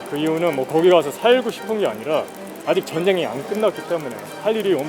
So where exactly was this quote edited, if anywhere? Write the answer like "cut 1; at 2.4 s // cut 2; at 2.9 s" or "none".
none